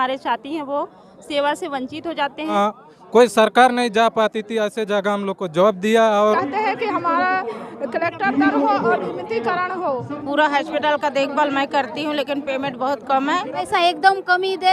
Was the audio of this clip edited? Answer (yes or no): yes